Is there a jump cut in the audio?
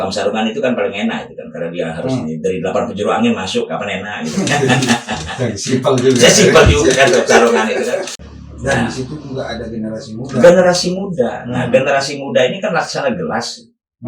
yes; 1 cut; at 8.2 s

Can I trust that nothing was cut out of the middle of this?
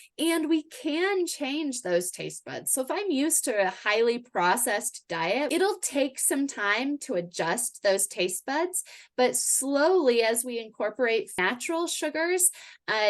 no; 2 cuts; at 5.5 s, 11.3 s

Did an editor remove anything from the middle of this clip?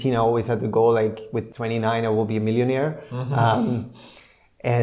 yes; 1 cut; at 1.4 s

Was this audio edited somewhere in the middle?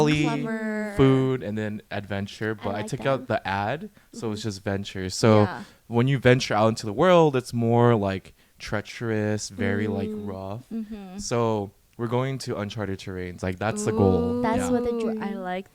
no; 0 cuts

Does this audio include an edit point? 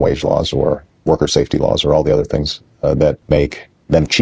no; 0 cuts

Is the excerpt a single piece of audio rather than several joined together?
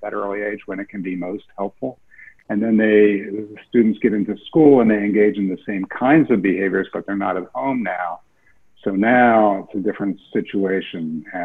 yes; 0 cuts

